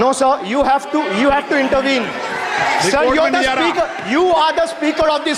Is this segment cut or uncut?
uncut